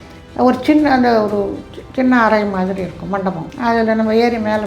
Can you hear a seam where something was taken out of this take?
yes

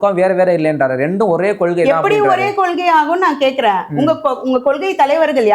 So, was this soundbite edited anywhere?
no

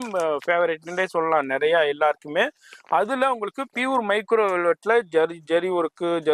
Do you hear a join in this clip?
no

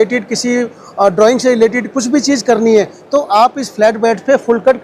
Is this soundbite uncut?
yes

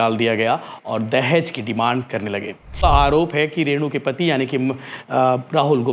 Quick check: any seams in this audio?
yes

